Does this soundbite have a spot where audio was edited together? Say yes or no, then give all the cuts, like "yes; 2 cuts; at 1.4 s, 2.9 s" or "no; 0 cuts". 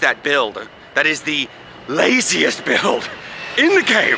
no; 0 cuts